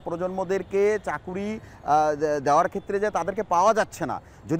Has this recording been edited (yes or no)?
no